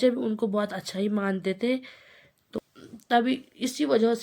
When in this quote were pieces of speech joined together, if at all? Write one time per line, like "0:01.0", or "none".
0:02.5